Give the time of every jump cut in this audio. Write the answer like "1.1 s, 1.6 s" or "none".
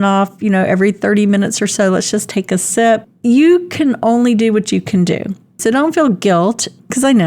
5.6 s